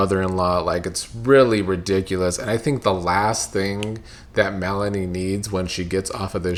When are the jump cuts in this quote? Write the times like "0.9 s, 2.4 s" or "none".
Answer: none

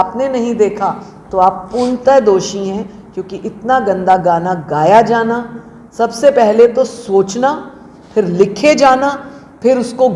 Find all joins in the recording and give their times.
none

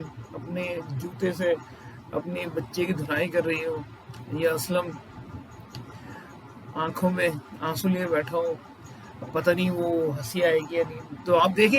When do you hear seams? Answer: 7.5 s

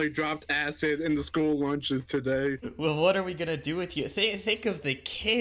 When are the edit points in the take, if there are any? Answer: 2.7 s

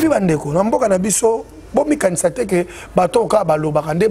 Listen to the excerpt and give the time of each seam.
none

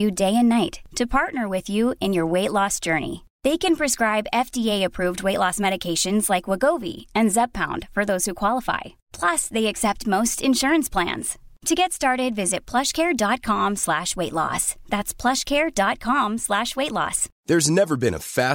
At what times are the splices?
17.3 s

